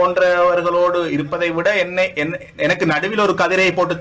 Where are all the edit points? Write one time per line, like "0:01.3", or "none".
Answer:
none

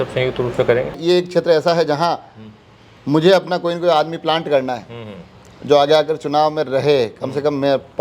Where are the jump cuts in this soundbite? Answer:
0:01.0

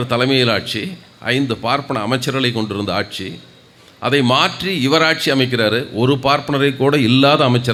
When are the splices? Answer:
none

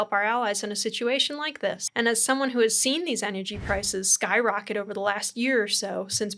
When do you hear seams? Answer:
0:01.8

